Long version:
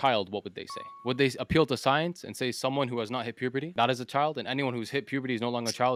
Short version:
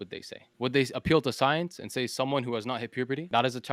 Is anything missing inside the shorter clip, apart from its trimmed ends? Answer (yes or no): no